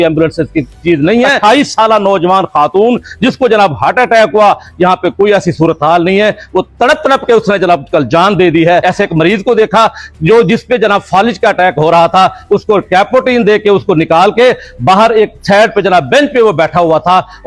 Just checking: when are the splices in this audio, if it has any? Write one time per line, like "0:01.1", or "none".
0:01.4
0:08.8